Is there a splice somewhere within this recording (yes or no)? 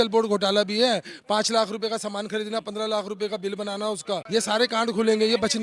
no